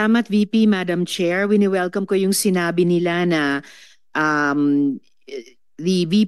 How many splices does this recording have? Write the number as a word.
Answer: zero